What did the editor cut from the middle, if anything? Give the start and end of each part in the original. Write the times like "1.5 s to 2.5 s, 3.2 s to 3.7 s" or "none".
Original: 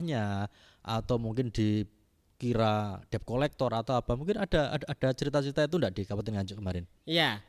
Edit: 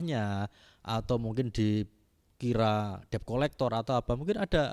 none